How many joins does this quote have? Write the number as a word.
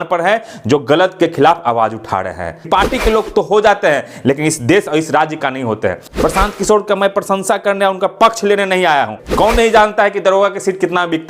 three